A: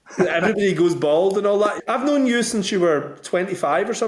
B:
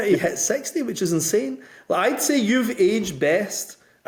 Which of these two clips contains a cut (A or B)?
A